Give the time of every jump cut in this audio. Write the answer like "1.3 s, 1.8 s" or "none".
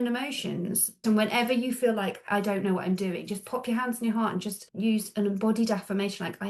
1.0 s, 2.2 s, 4.6 s